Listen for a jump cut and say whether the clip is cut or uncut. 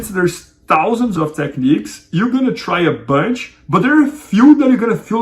cut